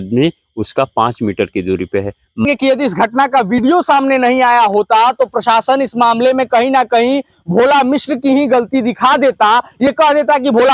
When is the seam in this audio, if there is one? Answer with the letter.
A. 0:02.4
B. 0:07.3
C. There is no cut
A